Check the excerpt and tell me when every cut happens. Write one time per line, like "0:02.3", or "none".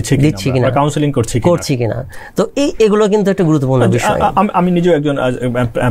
none